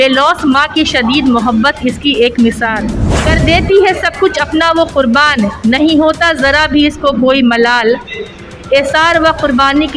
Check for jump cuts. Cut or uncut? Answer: cut